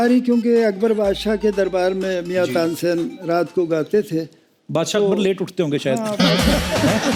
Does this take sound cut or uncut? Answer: uncut